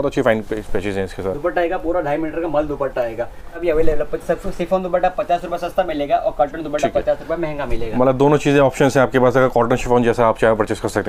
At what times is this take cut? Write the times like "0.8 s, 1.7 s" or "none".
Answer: none